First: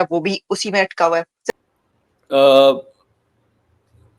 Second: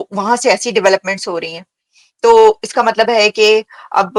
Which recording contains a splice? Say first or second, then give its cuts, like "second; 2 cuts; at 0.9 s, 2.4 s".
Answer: first; 1 cut; at 1.5 s